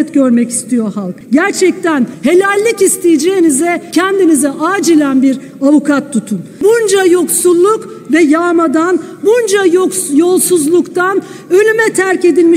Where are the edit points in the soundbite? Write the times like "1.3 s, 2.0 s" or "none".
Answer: 1.1 s, 2.1 s, 3.8 s, 6.4 s